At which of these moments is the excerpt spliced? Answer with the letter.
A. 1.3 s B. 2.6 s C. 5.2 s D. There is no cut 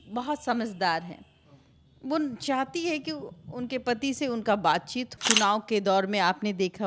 C